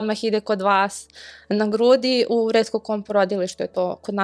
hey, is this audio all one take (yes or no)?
yes